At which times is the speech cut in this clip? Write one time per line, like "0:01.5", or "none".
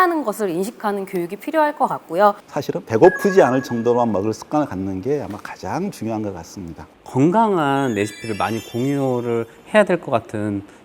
0:02.4
0:06.9